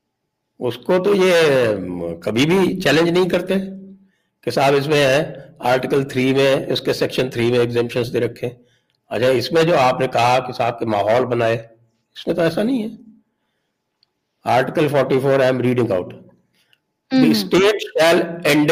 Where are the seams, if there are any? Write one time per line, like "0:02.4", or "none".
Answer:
none